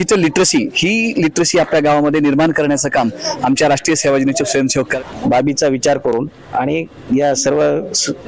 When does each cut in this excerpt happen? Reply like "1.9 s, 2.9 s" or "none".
4.9 s